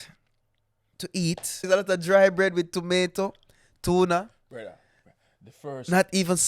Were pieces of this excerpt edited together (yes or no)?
yes